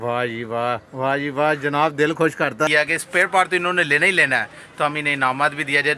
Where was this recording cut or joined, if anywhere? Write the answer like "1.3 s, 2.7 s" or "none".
2.7 s